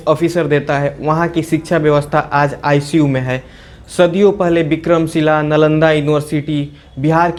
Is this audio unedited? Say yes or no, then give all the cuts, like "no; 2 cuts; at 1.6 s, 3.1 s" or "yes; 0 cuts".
yes; 0 cuts